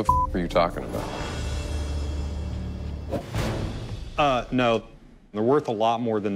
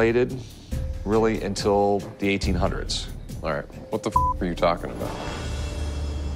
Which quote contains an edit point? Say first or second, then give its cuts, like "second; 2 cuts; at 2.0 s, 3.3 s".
first; 2 cuts; at 3.2 s, 5.0 s